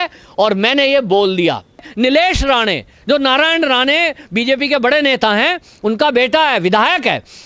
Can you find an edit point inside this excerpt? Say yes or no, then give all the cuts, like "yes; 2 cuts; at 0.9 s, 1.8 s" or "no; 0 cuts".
yes; 1 cut; at 1.9 s